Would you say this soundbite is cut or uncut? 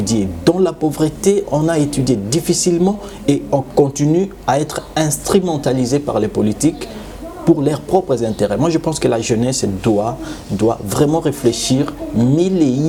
uncut